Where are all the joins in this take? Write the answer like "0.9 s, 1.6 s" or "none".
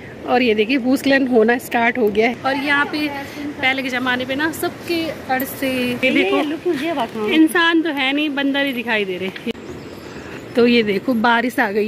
2.3 s, 6.0 s, 9.5 s